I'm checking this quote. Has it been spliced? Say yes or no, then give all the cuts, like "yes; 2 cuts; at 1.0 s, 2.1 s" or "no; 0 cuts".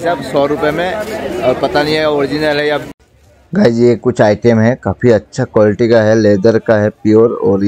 no; 0 cuts